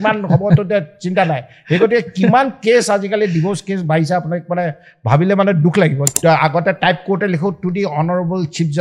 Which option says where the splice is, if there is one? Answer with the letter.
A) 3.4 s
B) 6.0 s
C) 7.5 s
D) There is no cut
B